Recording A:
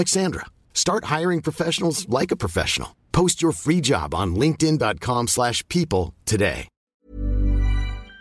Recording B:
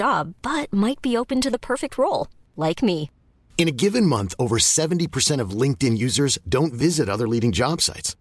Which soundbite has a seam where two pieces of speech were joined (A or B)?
A